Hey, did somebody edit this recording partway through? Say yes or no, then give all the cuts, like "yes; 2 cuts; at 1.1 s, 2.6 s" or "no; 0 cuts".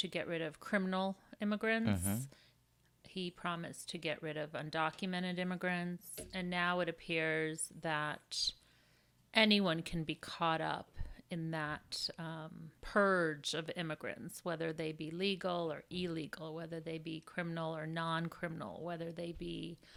no; 0 cuts